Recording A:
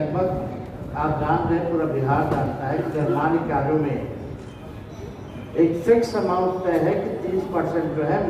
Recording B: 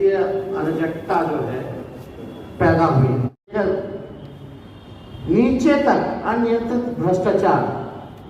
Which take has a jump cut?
B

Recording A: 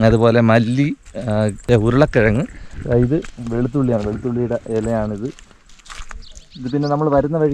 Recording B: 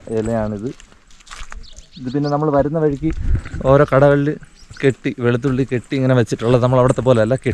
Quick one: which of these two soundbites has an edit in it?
A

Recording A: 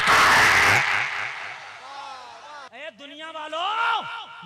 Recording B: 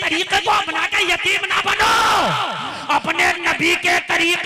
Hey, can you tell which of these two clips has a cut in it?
A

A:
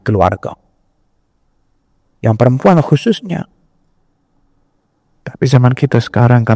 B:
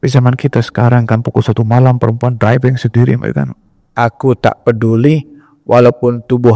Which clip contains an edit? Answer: B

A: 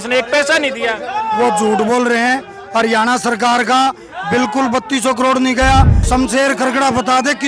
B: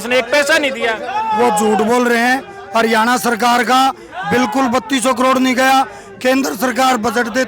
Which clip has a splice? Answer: A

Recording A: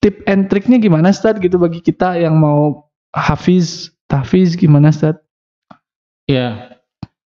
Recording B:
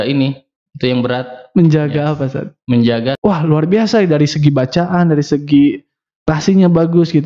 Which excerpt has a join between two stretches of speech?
B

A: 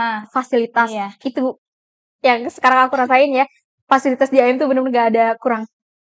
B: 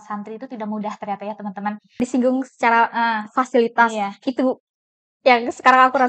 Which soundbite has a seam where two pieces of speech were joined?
B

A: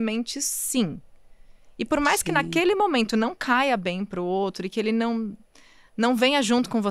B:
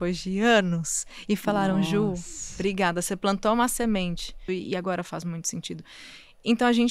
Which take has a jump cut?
B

